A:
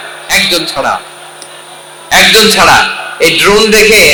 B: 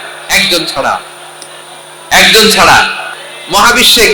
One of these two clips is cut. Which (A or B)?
B